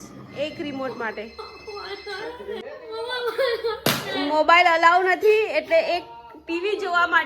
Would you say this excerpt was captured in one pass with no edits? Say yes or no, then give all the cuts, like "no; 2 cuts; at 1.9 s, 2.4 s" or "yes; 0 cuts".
no; 1 cut; at 2.6 s